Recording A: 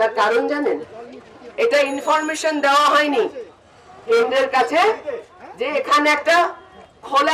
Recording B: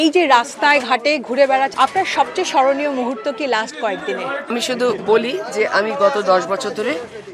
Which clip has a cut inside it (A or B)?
B